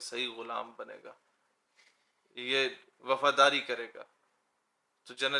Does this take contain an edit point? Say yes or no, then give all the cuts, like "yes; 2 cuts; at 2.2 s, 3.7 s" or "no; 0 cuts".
no; 0 cuts